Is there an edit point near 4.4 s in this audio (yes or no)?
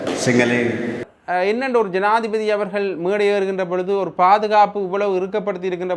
no